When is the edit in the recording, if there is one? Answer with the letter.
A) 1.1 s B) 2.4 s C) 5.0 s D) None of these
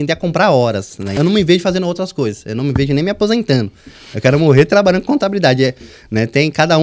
A